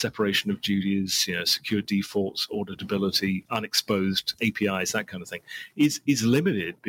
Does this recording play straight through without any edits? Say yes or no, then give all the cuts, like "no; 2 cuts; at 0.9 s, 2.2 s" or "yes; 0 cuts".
no; 2 cuts; at 3.4 s, 4.4 s